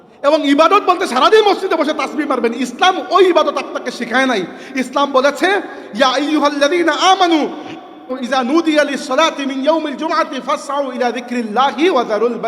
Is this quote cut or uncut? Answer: cut